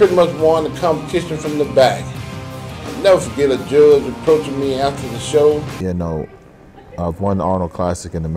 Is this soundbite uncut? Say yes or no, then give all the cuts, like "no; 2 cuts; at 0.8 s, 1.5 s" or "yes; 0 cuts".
yes; 0 cuts